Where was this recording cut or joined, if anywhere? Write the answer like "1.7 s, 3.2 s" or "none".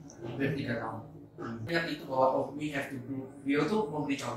1.7 s